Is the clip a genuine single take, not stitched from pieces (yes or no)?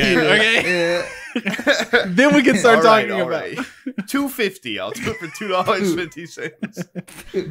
yes